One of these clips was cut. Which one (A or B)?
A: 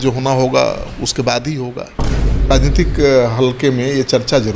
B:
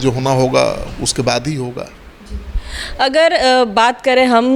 A